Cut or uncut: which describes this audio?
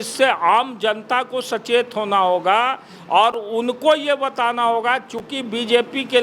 uncut